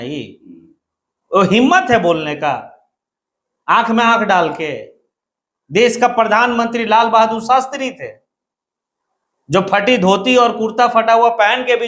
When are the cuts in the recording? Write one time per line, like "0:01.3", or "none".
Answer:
none